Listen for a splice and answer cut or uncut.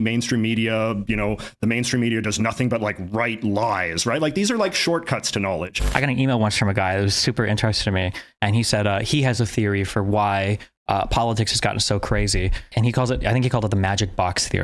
cut